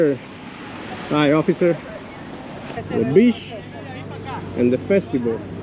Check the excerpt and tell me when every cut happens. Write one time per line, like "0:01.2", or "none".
0:02.8